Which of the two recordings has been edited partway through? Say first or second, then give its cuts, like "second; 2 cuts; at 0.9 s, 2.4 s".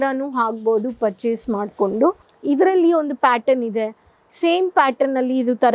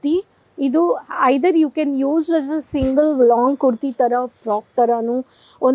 first; 1 cut; at 2.3 s